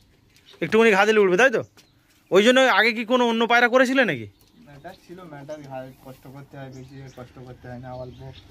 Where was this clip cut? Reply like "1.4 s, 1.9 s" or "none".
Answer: none